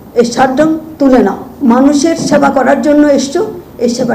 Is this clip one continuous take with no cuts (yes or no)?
no